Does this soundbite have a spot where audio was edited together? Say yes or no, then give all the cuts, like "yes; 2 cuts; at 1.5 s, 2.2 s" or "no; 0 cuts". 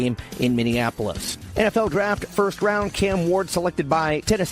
yes; 1 cut; at 1.3 s